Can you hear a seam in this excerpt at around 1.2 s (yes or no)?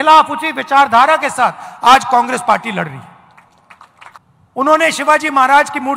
no